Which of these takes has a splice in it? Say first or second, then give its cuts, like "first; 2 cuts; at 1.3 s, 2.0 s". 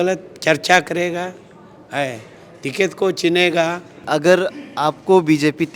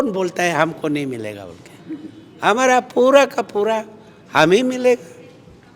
first; 1 cut; at 4.0 s